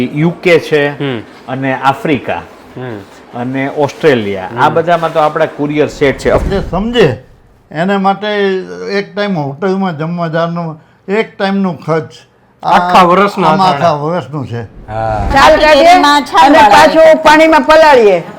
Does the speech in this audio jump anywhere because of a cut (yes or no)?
yes